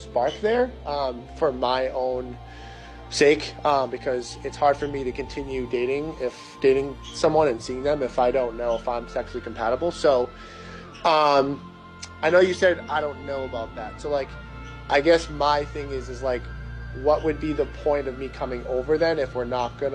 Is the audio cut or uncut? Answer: cut